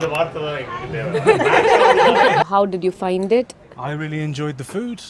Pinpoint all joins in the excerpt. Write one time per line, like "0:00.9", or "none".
0:02.4